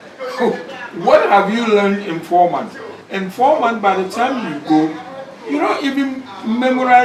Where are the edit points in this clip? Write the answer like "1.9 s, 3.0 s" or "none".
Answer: none

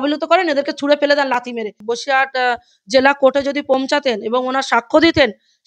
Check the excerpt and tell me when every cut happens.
1.8 s

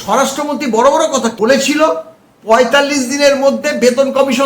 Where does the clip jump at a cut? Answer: 1.3 s

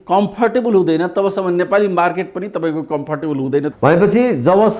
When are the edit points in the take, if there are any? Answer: 3.7 s

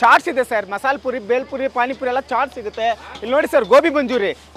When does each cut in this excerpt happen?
none

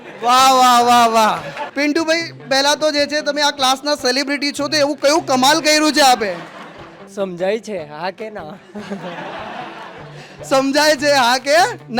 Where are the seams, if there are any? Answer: 1.6 s, 7.0 s

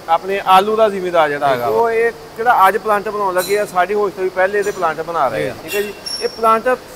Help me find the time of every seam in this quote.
1.6 s, 5.5 s

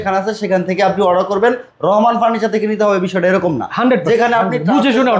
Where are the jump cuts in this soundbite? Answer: none

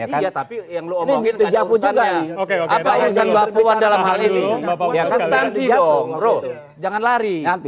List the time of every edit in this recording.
none

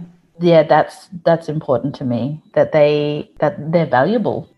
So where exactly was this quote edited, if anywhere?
2.4 s, 3.3 s

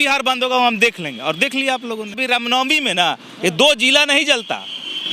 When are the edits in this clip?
2.2 s

